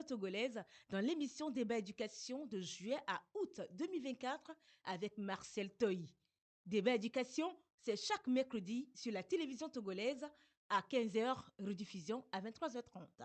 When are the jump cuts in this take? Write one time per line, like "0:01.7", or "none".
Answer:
none

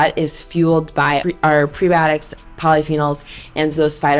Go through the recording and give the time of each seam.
0:01.2

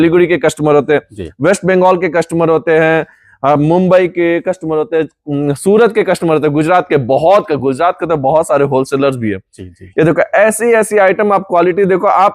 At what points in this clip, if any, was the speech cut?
none

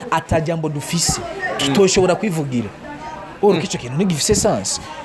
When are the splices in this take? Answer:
none

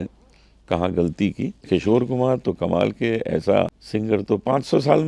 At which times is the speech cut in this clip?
0:01.6
0:03.8

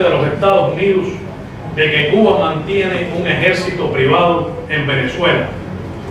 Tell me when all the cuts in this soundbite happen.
none

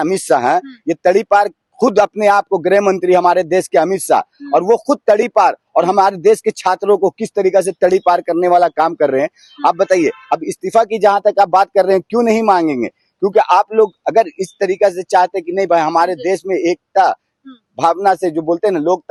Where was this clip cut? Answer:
none

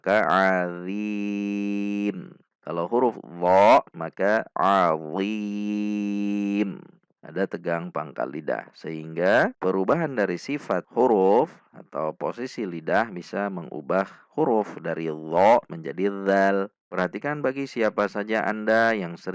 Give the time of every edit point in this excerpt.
0:16.8

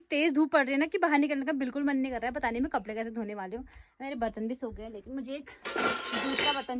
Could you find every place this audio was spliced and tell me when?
none

